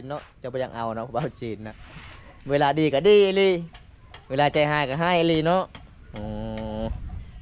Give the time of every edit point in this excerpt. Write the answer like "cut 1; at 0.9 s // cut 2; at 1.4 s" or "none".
none